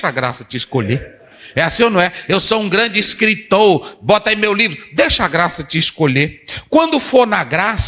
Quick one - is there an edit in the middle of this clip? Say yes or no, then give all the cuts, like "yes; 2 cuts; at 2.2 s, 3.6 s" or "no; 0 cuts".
no; 0 cuts